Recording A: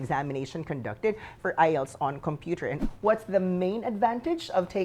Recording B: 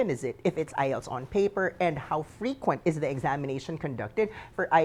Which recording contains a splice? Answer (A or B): A